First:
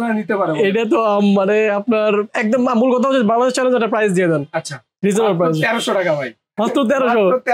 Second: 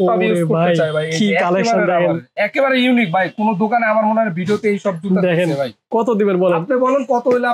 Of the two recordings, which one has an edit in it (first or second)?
second